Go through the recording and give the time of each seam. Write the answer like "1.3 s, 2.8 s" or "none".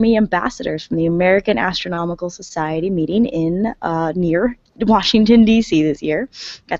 5.8 s

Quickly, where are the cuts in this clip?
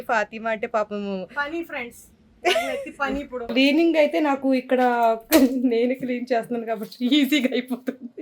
3.5 s

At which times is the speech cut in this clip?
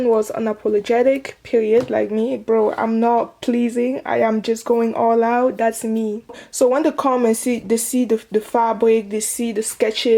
6.3 s

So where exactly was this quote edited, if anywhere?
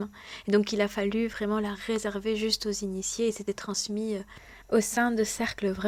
none

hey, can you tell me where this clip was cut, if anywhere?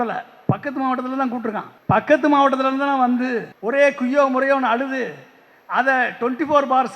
1.7 s, 3.5 s

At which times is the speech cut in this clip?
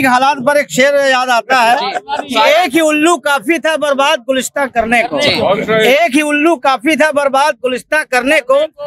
none

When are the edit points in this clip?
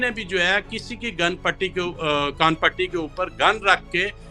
none

